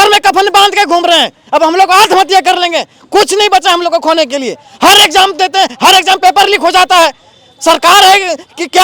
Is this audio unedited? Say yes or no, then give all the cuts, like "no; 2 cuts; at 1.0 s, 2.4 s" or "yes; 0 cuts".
yes; 0 cuts